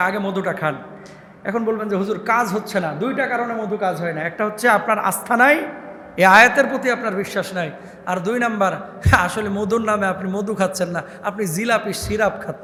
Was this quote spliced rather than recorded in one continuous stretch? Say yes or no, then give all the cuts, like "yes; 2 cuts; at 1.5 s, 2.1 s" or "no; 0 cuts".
no; 0 cuts